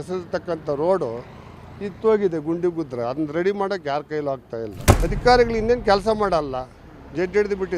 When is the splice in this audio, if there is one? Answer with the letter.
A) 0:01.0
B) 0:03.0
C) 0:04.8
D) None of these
C